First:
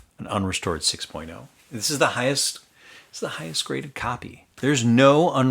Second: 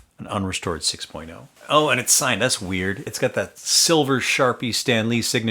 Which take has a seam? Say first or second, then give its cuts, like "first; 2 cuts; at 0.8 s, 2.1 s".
first; 2 cuts; at 1.5 s, 4.4 s